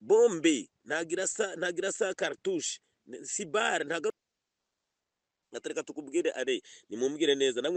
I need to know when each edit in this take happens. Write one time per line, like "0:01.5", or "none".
0:04.1